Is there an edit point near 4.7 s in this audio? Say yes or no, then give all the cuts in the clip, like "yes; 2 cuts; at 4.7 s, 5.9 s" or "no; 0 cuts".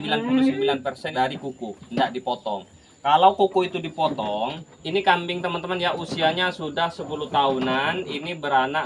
yes; 2 cuts; at 1.1 s, 4.7 s